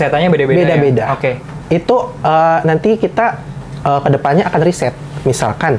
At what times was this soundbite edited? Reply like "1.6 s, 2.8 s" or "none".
none

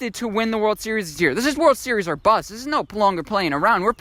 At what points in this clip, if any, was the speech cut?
none

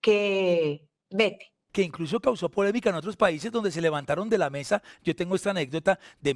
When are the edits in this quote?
1.6 s

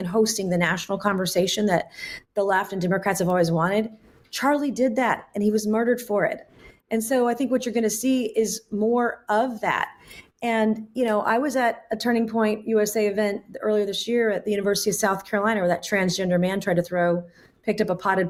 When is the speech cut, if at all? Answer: none

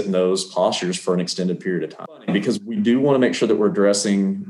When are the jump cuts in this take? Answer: 2.1 s

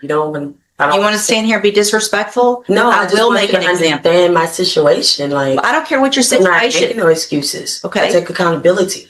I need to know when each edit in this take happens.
none

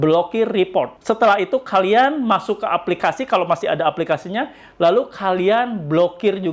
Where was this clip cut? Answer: 1.0 s

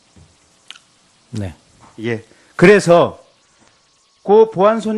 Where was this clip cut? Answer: 3.0 s

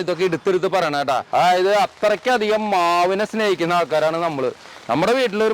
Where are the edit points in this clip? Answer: 1.2 s

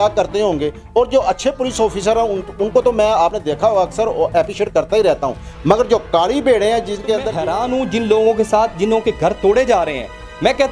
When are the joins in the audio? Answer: 7.4 s

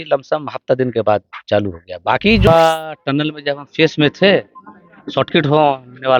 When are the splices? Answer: 2.5 s

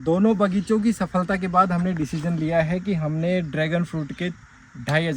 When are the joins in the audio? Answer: none

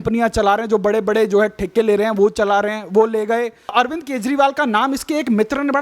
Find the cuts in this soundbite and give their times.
3.7 s

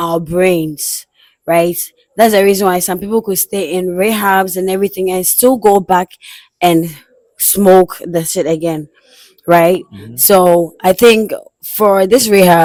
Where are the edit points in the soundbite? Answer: none

